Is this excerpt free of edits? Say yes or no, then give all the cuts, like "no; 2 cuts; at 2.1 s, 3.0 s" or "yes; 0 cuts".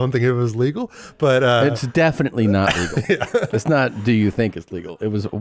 yes; 0 cuts